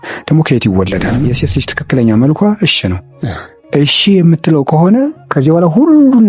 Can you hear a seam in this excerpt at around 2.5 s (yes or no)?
no